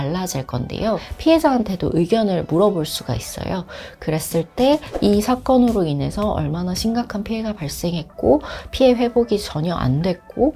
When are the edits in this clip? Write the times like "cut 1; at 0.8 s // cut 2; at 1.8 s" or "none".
cut 1; at 1.1 s // cut 2; at 4.8 s